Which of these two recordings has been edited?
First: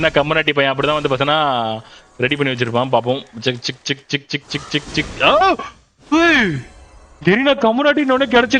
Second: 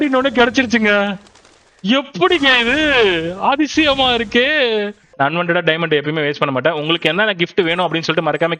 second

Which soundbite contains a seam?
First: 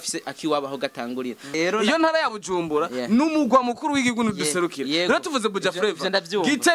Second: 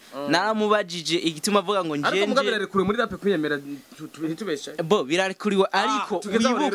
first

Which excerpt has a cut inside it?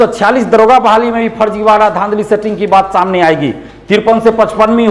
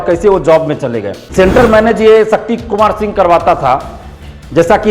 second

